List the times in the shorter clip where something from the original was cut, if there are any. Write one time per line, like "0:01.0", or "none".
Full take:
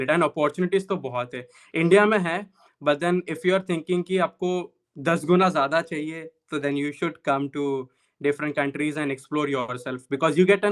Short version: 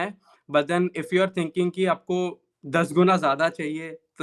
none